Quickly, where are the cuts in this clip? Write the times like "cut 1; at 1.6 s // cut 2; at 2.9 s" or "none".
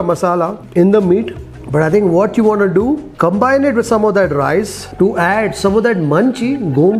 none

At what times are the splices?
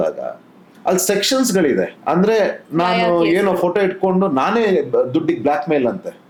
none

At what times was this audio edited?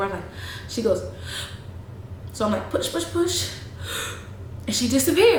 none

